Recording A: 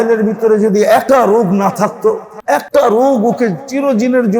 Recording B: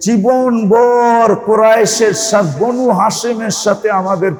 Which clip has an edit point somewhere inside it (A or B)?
A